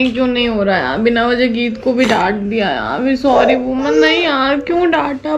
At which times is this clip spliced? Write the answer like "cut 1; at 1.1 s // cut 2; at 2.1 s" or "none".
none